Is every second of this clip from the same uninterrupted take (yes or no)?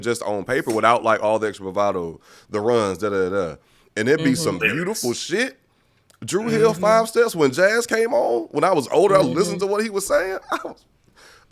yes